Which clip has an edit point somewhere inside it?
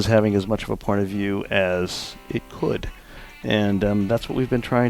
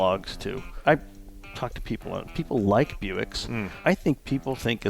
second; 1 cut; at 3.7 s

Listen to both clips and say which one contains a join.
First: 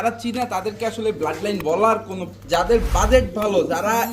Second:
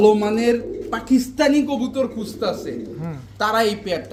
first; 1 cut; at 2.2 s

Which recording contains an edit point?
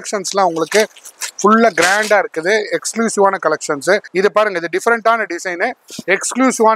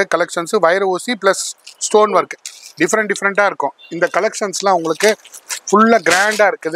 first; 1 cut; at 4.1 s

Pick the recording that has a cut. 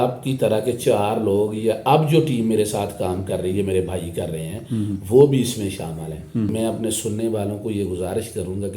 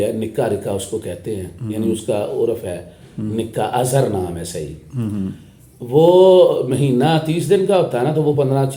first; 1 cut; at 6.5 s

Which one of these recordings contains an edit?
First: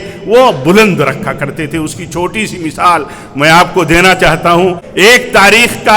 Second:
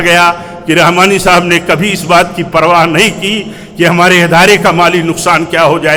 first; 1 cut; at 4.8 s

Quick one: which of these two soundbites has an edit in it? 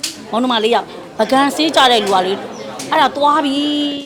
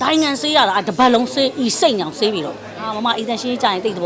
second; 1 cut; at 2.9 s

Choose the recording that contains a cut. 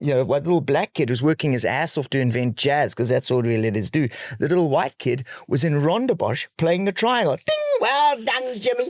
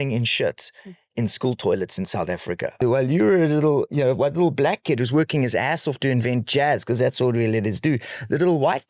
second; 1 cut; at 2.8 s

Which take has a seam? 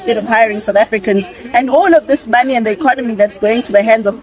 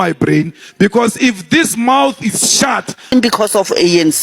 second; 1 cut; at 3.1 s

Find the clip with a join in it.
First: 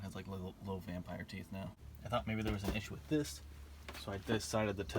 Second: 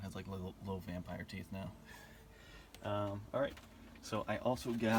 first; 1 cut; at 1.9 s

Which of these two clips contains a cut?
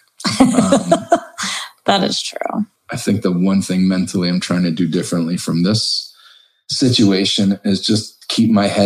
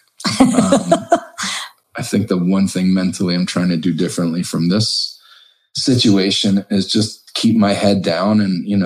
second; 1 cut; at 1.8 s

